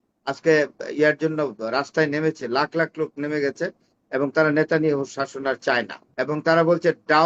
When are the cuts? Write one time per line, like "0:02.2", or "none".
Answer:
0:06.0